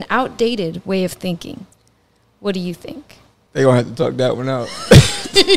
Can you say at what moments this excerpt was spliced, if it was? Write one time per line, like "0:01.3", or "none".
none